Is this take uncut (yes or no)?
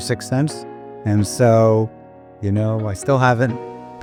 yes